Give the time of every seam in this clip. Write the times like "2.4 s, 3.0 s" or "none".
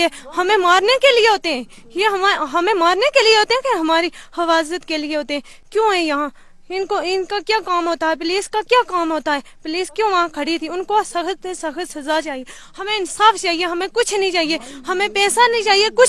none